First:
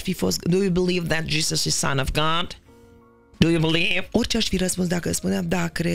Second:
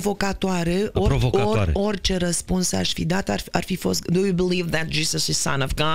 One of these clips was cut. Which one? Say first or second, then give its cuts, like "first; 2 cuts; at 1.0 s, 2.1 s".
first; 1 cut; at 4.0 s